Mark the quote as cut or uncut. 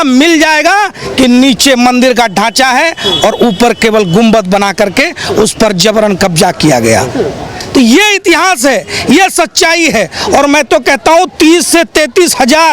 uncut